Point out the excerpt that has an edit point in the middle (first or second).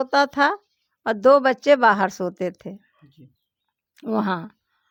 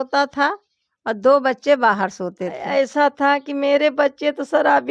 second